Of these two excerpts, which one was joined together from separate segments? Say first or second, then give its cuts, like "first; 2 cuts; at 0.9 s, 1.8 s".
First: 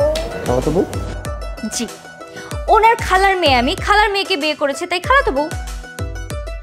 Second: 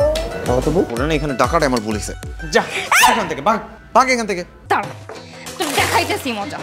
second; 2 cuts; at 0.9 s, 4.5 s